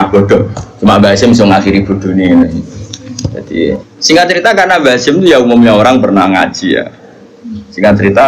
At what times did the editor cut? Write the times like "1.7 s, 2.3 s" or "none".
3.8 s